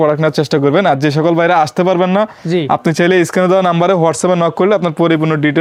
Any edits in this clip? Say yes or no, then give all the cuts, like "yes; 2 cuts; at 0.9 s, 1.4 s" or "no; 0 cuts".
no; 0 cuts